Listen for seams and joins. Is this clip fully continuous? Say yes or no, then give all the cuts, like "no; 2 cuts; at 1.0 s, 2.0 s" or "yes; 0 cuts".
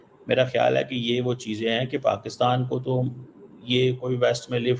yes; 0 cuts